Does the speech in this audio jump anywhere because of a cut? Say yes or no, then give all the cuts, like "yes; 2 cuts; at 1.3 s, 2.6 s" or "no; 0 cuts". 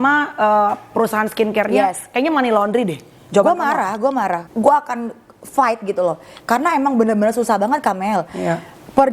yes; 1 cut; at 4.5 s